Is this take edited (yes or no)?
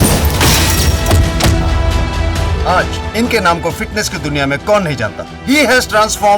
no